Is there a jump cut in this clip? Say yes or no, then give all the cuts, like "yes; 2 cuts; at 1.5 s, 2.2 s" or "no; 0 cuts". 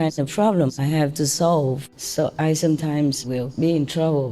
yes; 1 cut; at 1.8 s